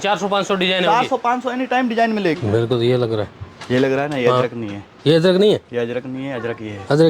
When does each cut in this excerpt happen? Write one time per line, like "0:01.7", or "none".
0:02.4